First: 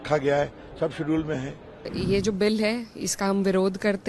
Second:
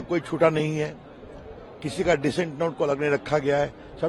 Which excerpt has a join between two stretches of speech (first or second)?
first